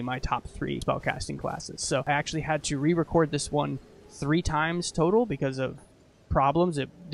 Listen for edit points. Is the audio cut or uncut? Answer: cut